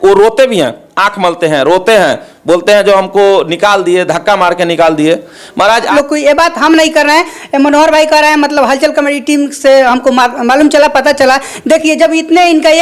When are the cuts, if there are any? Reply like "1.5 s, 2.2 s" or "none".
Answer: 5.9 s